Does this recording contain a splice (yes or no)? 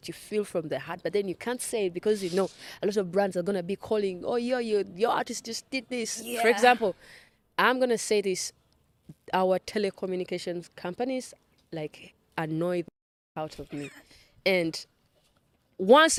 no